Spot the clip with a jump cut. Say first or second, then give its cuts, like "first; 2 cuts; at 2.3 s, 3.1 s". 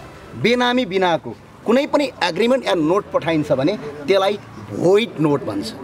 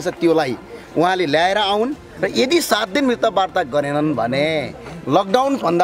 second; 1 cut; at 2.1 s